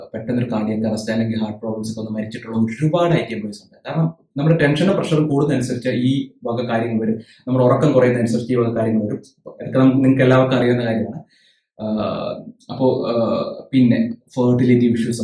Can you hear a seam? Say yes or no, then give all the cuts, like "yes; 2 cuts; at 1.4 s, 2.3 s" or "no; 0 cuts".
no; 0 cuts